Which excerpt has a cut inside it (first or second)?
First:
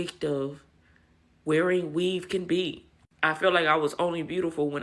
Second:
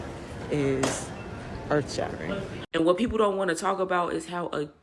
second